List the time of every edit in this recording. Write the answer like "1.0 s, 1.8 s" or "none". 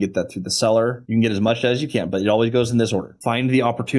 1.0 s, 3.1 s